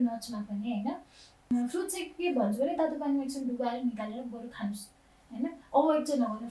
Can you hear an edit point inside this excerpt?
yes; 1 cut; at 1.5 s

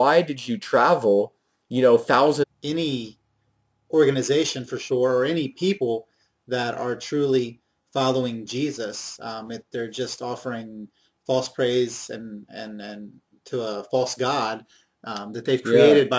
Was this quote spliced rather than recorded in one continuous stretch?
no; 0 cuts

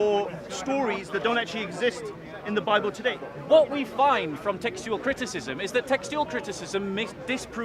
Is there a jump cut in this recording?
yes; 1 cut; at 3.2 s

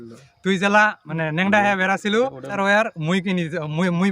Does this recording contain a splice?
yes; 2 cuts; at 1.0 s, 2.6 s

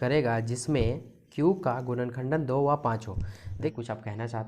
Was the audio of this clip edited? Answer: yes; 1 cut; at 3.6 s

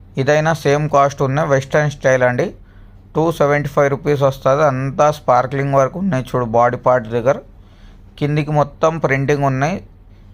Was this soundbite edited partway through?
no; 0 cuts

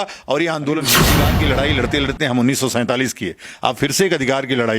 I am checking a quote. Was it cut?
yes; 1 cut; at 1.0 s

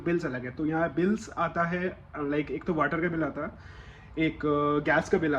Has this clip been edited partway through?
no; 0 cuts

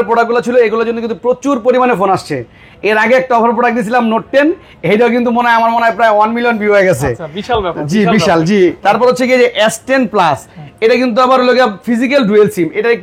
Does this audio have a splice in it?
no; 0 cuts

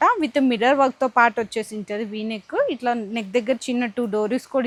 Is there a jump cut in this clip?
no; 0 cuts

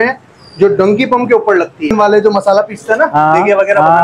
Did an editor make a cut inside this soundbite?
yes; 1 cut; at 1.9 s

